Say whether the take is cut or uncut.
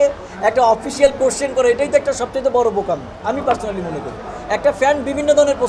uncut